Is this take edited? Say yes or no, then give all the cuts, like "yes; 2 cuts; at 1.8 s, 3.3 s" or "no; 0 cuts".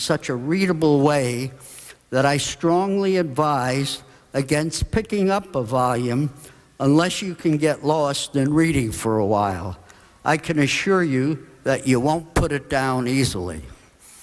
yes; 1 cut; at 9.4 s